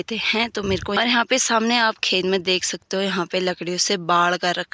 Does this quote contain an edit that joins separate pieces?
yes; 1 cut; at 1.0 s

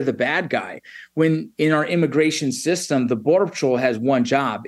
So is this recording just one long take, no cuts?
yes; 0 cuts

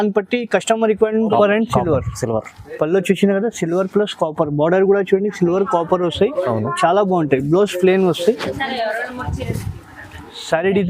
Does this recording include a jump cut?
yes; 1 cut; at 1.3 s

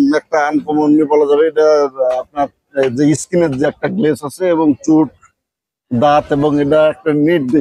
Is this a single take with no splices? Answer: yes; 0 cuts

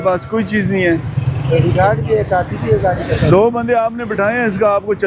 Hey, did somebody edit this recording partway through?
no; 0 cuts

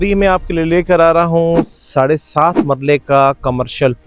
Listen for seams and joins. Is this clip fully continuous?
yes; 0 cuts

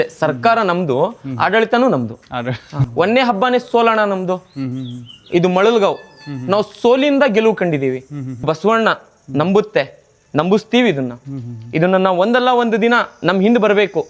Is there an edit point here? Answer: yes; 2 cuts; at 2.8 s, 8.4 s

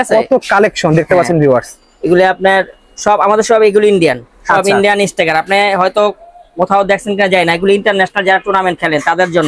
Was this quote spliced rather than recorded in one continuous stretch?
no; 0 cuts

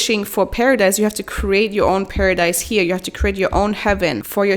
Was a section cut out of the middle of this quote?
no; 0 cuts

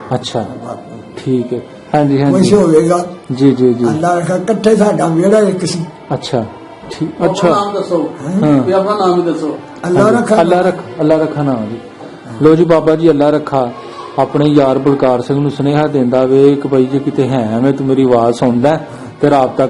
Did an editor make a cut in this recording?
yes; 1 cut; at 1.8 s

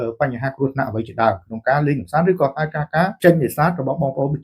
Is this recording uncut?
no; 1 cut; at 3.2 s

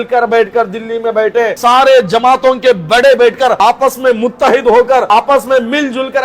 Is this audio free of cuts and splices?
no; 3 cuts; at 1.6 s, 3.6 s, 5.1 s

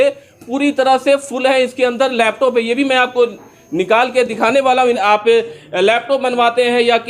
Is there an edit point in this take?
yes; 1 cut; at 5.0 s

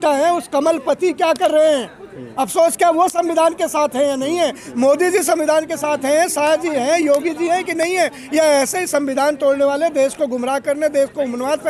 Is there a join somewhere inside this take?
no; 0 cuts

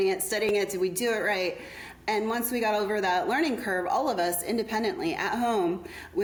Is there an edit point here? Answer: no; 0 cuts

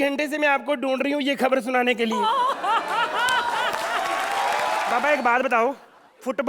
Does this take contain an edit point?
yes; 1 cut; at 4.9 s

